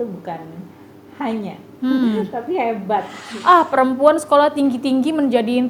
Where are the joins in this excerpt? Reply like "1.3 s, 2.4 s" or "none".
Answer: 3.2 s